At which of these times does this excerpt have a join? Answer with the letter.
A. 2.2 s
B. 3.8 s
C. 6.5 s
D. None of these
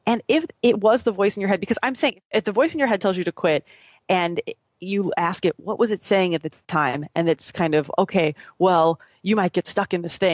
A